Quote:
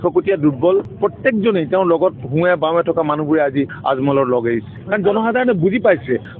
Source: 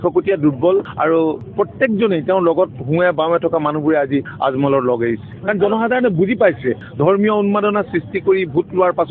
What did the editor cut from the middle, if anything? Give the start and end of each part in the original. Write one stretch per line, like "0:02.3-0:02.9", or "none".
0:00.9-0:01.5